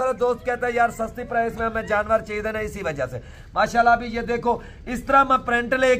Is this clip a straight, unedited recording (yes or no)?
yes